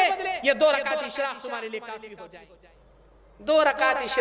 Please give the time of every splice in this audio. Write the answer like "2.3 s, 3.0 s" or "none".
2.3 s